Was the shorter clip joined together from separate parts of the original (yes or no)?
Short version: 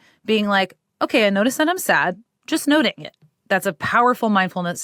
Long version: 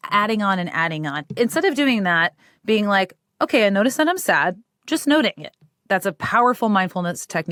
no